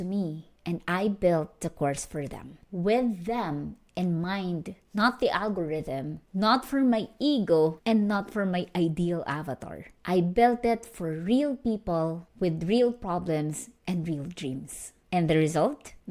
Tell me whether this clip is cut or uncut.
uncut